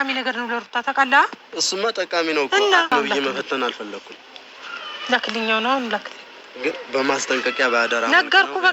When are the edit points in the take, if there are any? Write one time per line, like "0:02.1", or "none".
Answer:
0:02.9